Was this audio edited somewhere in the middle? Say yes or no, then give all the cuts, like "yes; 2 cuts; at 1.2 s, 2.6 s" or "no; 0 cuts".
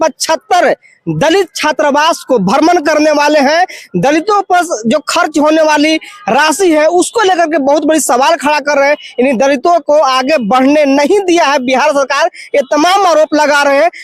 no; 0 cuts